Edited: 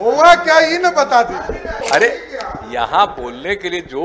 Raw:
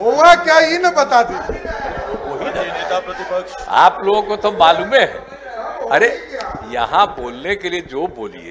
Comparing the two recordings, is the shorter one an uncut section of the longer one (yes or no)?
no